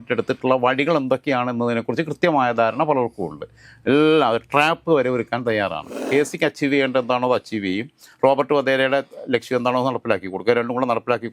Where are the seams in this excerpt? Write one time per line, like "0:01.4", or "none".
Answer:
0:06.1